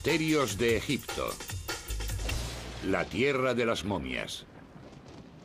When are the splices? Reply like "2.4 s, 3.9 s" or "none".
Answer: 1.6 s